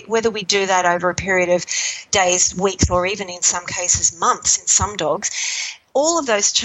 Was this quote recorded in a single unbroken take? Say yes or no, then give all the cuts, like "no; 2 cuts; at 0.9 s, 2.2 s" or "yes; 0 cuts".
yes; 0 cuts